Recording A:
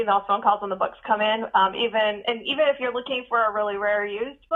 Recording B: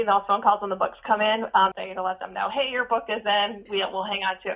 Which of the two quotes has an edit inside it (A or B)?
B